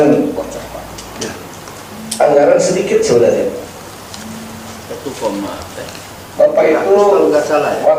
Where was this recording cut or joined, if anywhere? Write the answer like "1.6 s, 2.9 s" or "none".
none